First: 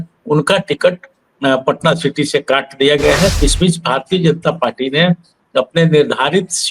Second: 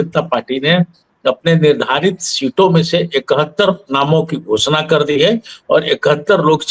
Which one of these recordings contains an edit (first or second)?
first